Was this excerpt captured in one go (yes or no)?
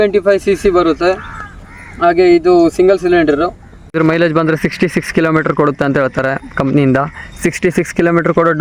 no